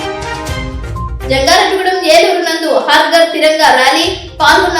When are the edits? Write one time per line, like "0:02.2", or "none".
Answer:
0:01.2